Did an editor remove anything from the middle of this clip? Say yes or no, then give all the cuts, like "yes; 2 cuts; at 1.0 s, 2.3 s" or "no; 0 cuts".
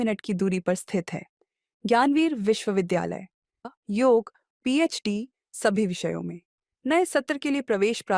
yes; 1 cut; at 3.6 s